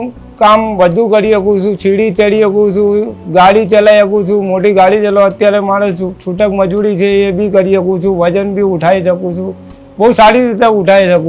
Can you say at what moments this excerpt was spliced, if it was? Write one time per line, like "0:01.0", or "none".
none